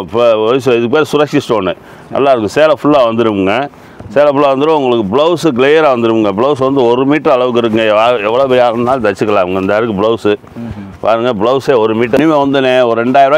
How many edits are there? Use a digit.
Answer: 1